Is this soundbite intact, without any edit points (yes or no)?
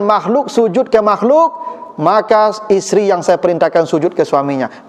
yes